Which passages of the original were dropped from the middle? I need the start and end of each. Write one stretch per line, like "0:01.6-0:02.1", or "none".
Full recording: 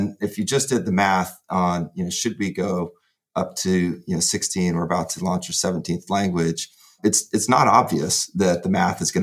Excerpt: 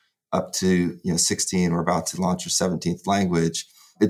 none